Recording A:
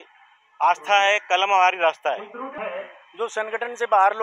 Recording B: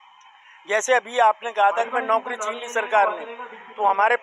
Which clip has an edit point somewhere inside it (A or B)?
A